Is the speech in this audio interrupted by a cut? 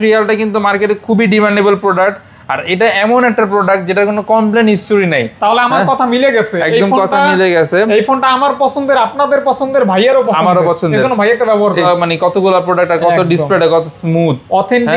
yes; 2 cuts; at 5.3 s, 11.8 s

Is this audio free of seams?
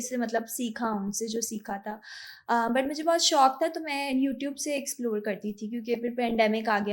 yes; 0 cuts

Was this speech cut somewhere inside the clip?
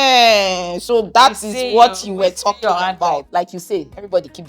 yes; 1 cut; at 3.3 s

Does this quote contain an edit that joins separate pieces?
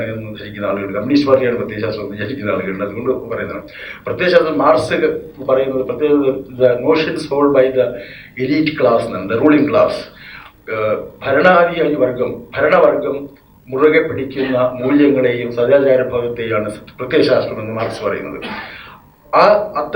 no; 0 cuts

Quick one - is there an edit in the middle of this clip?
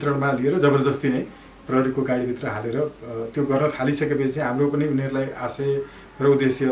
no; 0 cuts

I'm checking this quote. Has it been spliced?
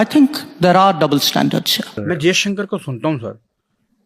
yes; 1 cut; at 1.9 s

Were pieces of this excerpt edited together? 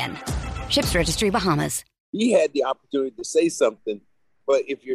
yes; 1 cut; at 2.0 s

